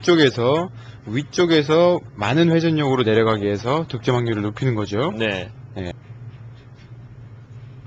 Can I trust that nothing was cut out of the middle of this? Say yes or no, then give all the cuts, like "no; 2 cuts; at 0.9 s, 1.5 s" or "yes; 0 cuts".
no; 1 cut; at 5.9 s